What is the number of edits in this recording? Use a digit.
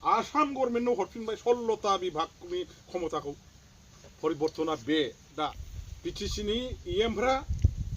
1